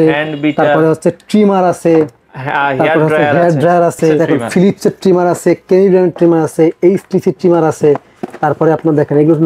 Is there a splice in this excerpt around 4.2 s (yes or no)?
yes